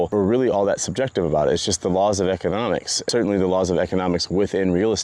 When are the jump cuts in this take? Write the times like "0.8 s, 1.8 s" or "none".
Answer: 3.0 s